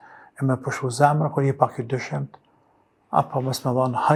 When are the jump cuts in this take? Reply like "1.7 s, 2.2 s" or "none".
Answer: none

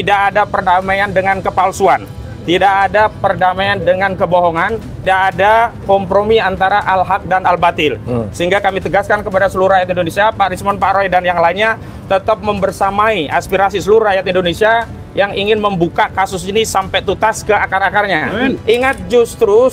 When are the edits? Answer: 5.0 s, 18.6 s

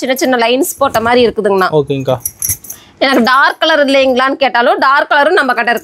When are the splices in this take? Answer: none

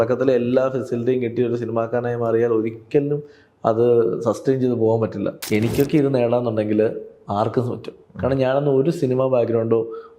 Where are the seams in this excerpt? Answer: 5.4 s

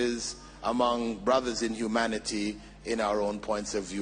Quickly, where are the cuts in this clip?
none

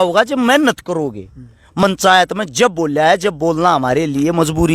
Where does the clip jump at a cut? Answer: 1.8 s

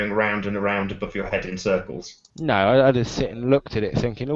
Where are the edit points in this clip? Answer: none

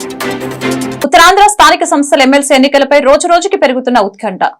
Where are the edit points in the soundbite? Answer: 1.0 s

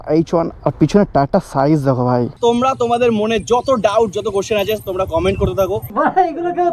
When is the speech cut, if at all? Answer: 2.3 s, 5.8 s

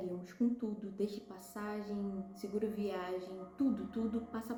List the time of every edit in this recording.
none

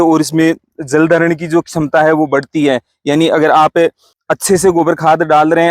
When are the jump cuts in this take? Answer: none

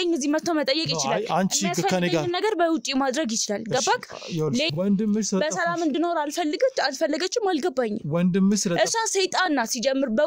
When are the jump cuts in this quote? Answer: 4.7 s

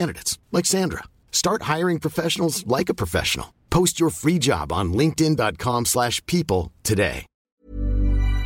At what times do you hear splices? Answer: 7.5 s

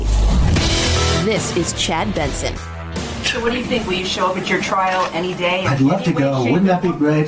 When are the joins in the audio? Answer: 3.2 s

